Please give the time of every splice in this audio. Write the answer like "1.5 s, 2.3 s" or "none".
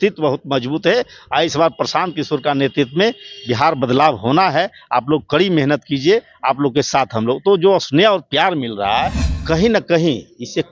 9.3 s